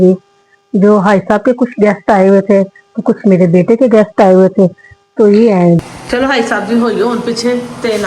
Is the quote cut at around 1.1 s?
no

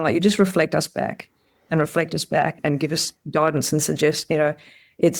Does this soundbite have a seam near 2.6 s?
yes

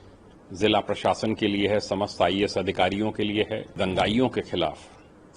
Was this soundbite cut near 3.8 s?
yes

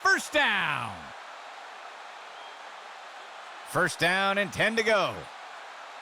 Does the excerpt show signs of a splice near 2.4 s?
no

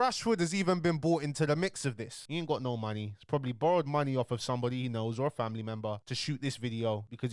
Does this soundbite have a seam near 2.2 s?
yes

